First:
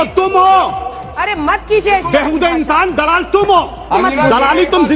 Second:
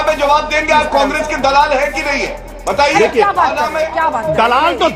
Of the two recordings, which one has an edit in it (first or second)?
first